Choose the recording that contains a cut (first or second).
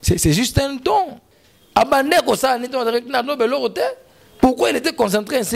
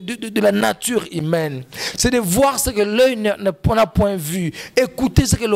first